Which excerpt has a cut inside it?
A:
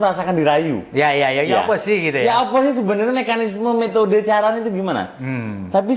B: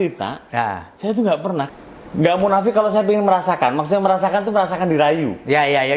B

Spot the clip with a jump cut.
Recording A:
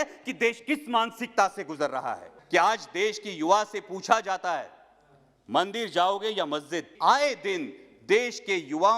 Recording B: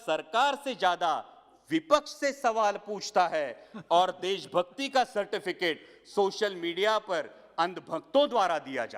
A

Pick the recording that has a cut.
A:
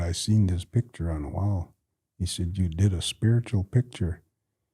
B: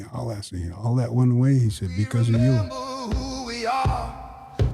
B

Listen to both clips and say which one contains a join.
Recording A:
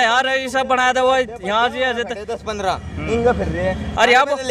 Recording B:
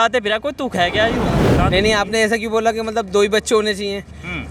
B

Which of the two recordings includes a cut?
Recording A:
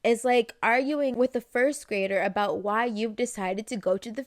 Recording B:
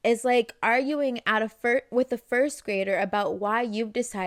A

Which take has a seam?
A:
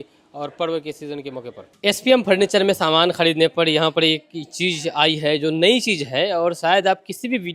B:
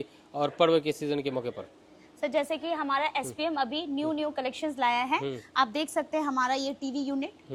A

